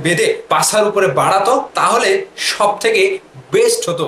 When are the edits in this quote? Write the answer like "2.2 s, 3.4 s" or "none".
1.7 s